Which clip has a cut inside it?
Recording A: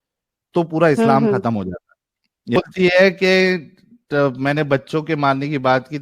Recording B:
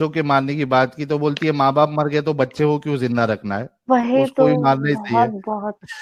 A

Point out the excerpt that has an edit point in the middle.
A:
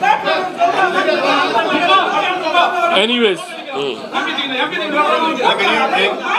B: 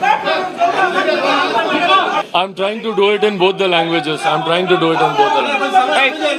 B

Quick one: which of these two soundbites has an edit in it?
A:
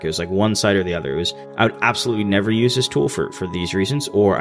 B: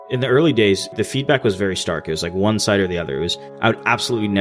B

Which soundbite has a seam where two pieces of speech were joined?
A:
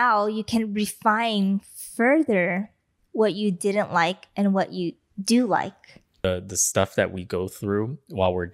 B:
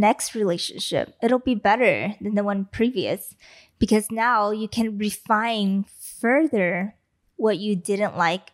A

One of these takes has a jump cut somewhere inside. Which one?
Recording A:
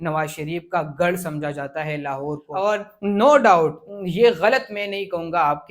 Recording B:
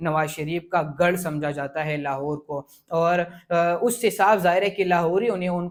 A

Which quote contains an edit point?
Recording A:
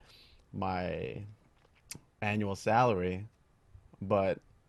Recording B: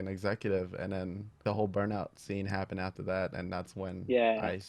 B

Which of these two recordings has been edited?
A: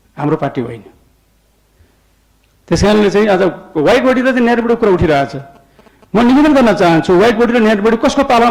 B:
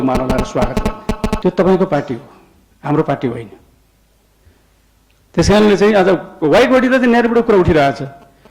B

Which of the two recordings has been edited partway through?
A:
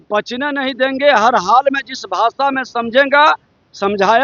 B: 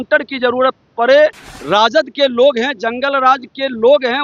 B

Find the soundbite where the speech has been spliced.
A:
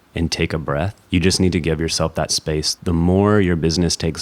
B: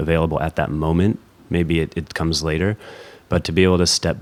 A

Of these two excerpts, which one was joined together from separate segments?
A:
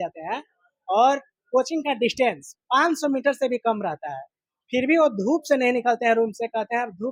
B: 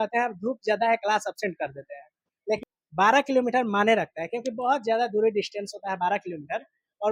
B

